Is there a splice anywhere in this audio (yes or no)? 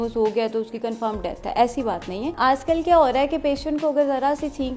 yes